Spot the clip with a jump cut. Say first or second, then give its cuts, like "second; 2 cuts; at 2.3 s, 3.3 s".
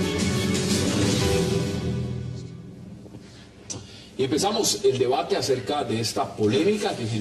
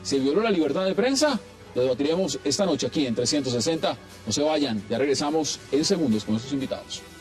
second; 1 cut; at 2.9 s